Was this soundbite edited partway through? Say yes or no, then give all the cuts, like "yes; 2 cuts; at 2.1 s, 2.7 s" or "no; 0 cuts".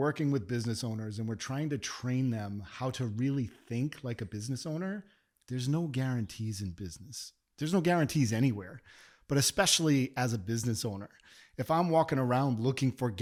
no; 0 cuts